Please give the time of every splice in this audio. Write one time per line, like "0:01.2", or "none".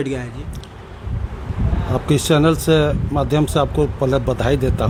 none